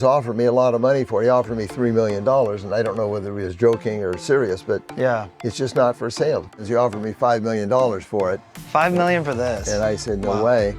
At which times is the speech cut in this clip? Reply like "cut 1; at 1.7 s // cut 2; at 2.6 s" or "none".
cut 1; at 6.6 s